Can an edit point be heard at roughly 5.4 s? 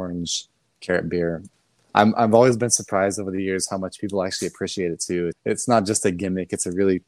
yes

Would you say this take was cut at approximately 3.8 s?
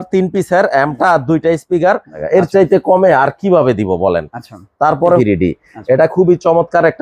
no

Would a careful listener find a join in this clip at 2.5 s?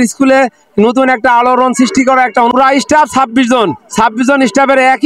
yes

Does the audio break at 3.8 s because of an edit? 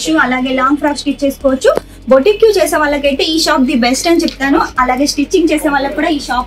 no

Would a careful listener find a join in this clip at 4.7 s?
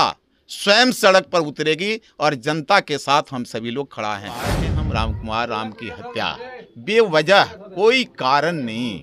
yes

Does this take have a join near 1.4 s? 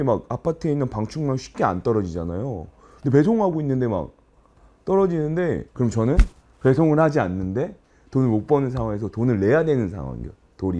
no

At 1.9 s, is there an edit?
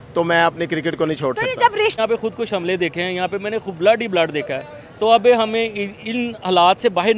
yes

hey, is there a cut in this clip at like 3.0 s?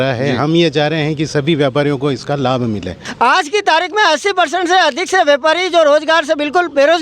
yes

